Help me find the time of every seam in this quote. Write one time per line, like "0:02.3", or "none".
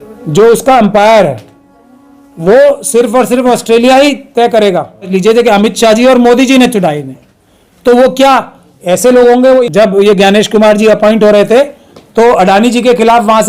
0:05.1
0:09.6